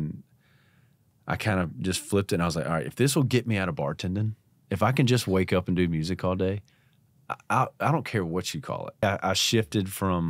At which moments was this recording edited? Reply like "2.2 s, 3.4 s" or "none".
9.0 s